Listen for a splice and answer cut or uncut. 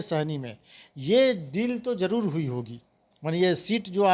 uncut